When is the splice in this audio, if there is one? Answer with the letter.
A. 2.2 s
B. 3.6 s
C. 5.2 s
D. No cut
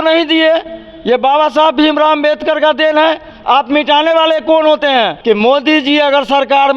C